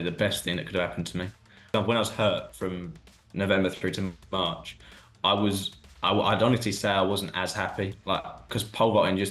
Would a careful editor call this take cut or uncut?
cut